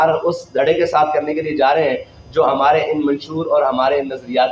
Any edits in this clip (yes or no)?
no